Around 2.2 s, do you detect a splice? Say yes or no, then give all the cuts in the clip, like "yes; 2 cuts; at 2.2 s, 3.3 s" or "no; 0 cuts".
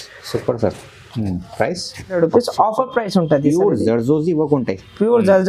yes; 1 cut; at 2.2 s